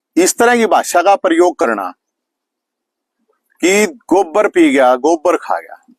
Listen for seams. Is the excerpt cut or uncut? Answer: uncut